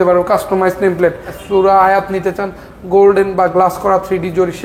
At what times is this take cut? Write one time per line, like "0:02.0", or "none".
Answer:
0:01.3